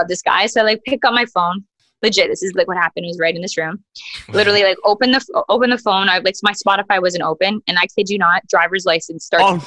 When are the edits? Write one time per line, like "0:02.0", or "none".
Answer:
none